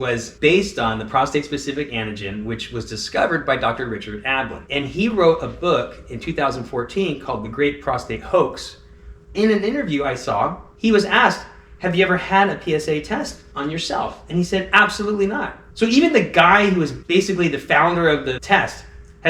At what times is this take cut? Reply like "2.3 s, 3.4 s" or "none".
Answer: 4.6 s, 9.3 s, 13.4 s, 15.6 s